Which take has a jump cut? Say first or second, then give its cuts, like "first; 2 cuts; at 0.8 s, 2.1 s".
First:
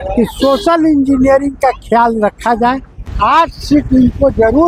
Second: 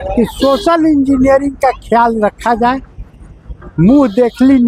first; 1 cut; at 3.3 s